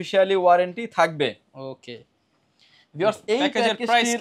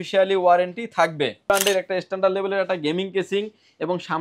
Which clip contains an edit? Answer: second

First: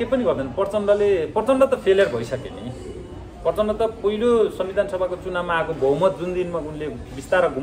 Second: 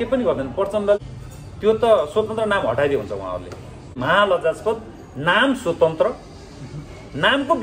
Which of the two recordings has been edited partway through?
second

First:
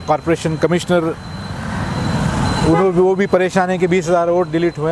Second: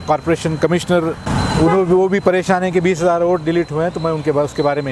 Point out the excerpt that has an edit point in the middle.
second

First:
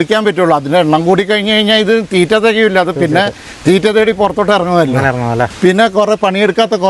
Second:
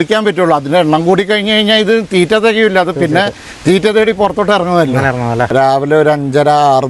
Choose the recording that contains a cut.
second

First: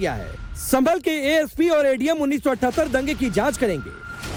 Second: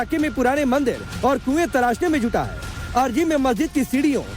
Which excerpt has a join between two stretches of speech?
second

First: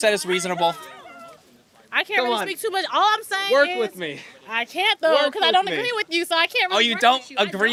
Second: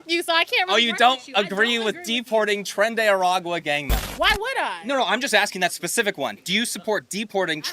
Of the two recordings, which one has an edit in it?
second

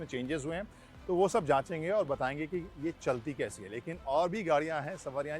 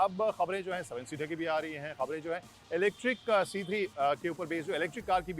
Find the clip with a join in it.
second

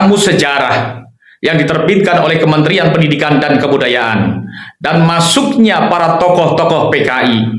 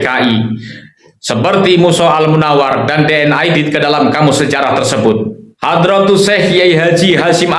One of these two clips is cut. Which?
second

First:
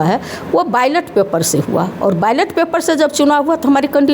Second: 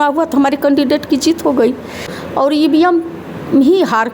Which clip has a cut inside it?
second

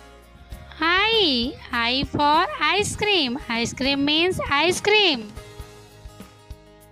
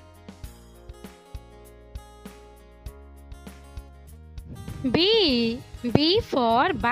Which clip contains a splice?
second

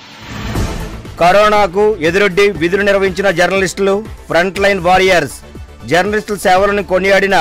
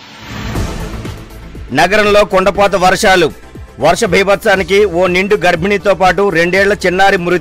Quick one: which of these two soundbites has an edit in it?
first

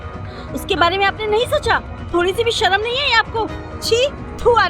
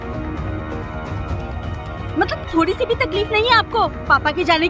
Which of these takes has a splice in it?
first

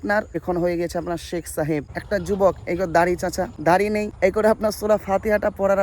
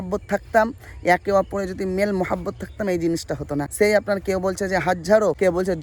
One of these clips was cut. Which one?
first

